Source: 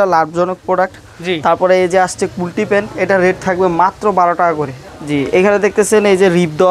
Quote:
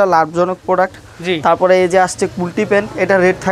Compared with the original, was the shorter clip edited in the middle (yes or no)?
no